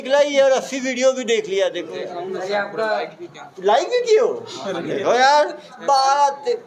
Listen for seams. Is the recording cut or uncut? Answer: cut